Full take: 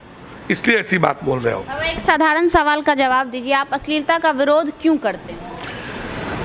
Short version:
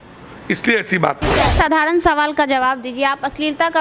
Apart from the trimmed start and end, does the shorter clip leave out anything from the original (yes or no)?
yes